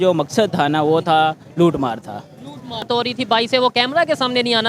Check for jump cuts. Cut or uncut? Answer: cut